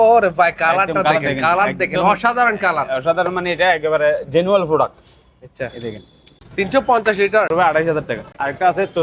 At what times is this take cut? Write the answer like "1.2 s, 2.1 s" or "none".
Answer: 6.4 s, 7.9 s